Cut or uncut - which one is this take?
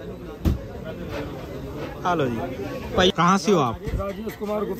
cut